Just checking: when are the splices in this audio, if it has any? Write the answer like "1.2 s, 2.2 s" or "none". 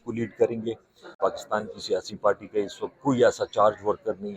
1.0 s